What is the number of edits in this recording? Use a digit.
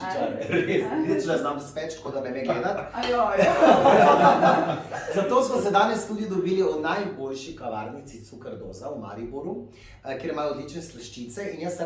0